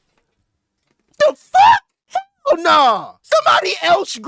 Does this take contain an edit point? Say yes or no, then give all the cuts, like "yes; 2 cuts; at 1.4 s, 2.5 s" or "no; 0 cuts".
yes; 1 cut; at 2.0 s